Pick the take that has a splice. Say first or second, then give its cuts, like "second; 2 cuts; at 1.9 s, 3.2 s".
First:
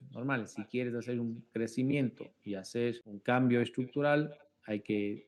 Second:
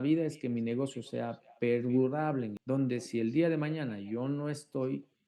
second; 1 cut; at 2.6 s